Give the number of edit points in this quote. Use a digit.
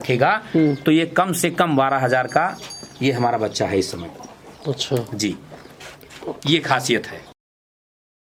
0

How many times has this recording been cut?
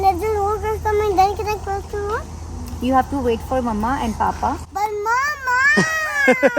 0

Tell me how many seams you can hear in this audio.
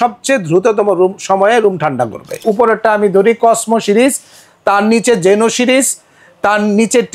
1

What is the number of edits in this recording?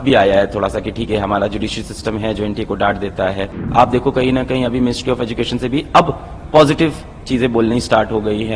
1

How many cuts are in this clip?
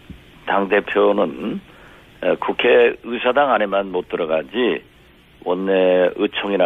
1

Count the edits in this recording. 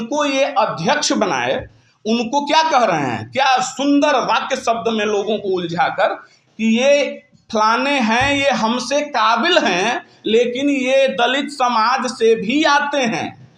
0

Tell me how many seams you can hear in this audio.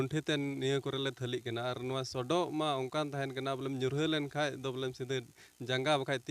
0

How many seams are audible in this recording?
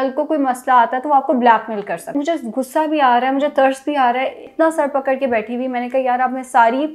2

